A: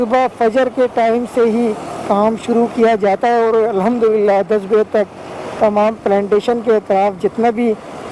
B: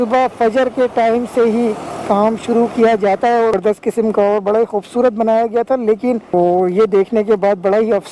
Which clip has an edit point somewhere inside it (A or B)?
B